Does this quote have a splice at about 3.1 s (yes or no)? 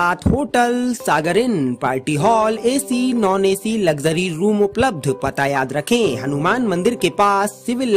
no